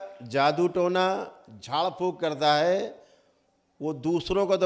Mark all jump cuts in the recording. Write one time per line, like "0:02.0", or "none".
none